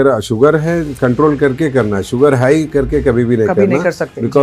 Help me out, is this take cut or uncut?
uncut